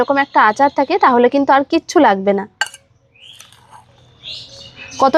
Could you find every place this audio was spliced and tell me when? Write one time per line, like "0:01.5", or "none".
none

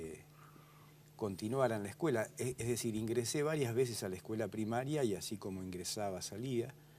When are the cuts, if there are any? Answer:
0:05.3

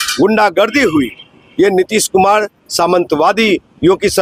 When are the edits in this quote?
none

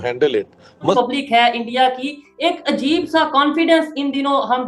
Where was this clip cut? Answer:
0:00.9

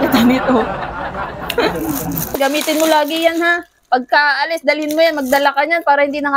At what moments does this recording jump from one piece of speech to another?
0:02.3

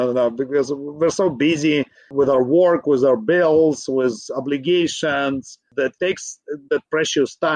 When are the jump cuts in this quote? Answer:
0:05.7

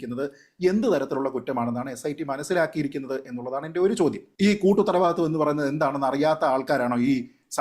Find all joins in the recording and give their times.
0:04.3

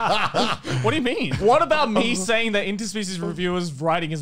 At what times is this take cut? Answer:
0:01.3

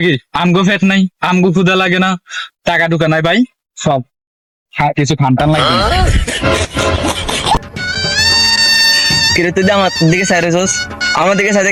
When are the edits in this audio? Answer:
none

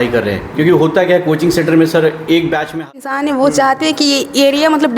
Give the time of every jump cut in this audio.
0:02.8

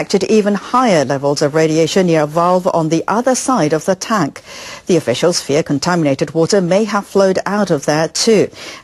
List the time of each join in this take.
none

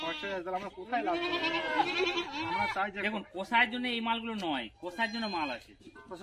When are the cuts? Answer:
0:01.6

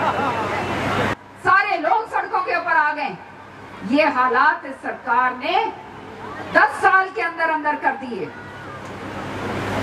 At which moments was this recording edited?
0:01.1

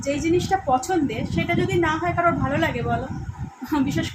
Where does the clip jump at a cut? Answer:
none

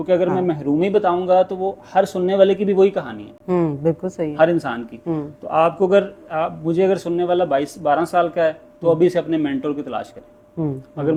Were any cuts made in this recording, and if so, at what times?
none

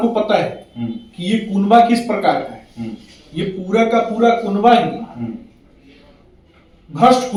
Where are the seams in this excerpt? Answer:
none

